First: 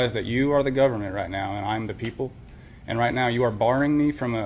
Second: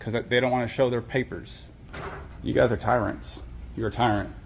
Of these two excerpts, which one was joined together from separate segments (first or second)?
second